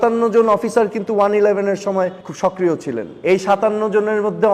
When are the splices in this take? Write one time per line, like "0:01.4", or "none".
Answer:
0:02.2
0:03.1